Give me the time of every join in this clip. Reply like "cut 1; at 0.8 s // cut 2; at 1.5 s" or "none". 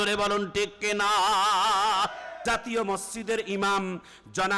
cut 1; at 2.3 s